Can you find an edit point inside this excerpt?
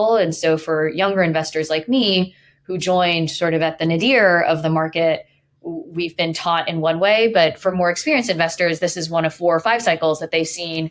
no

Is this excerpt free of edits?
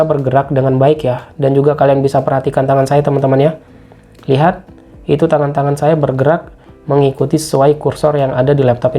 yes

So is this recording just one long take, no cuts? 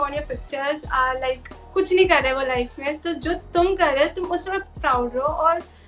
yes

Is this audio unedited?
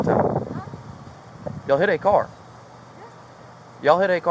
yes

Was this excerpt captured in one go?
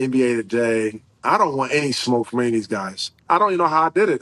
no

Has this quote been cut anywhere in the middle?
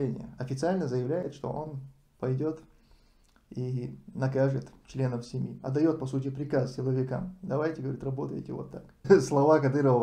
yes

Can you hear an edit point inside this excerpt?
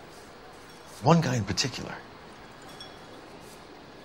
yes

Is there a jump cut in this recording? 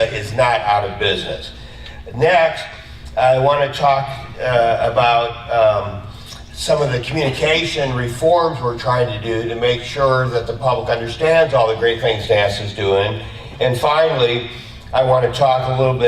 yes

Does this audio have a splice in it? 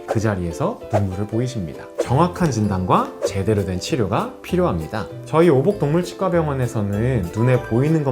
yes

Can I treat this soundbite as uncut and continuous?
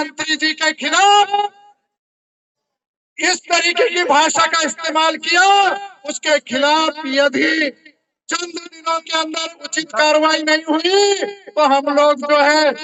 yes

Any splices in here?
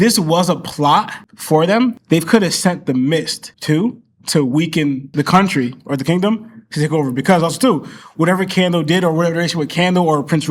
no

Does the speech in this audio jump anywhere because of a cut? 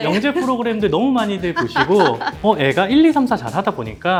no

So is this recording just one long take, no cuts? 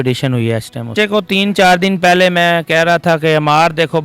no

